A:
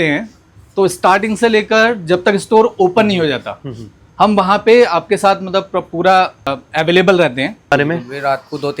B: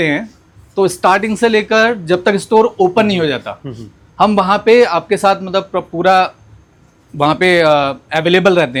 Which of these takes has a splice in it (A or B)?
A